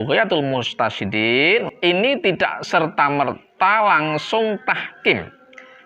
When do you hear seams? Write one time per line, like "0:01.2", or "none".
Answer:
none